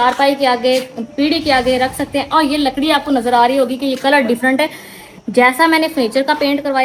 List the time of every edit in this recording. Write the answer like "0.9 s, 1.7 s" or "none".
none